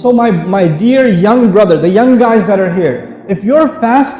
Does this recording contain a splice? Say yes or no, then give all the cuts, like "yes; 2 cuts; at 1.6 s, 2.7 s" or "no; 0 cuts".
no; 0 cuts